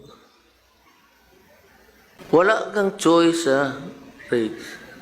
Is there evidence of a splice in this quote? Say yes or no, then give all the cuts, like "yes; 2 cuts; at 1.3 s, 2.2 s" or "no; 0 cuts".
yes; 1 cut; at 2.2 s